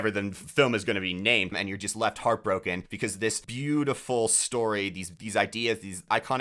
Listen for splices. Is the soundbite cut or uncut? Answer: cut